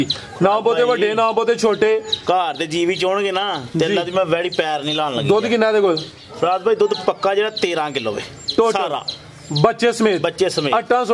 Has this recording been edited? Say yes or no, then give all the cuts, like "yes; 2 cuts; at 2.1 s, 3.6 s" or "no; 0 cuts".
no; 0 cuts